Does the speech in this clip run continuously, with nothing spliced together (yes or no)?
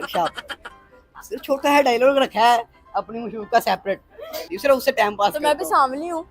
no